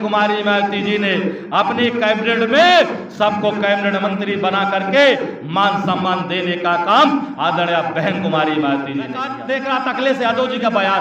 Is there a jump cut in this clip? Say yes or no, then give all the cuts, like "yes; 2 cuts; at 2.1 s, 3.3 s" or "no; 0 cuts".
yes; 1 cut; at 9.3 s